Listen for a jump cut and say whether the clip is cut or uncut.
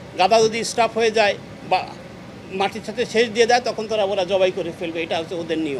uncut